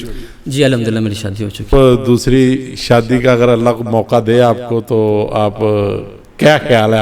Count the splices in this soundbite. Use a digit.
1